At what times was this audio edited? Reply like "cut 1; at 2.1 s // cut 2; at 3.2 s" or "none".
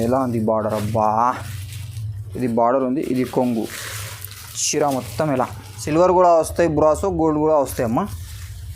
cut 1; at 5.7 s